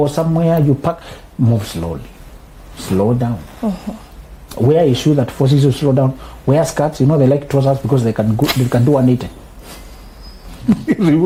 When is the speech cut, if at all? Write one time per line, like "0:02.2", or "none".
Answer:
none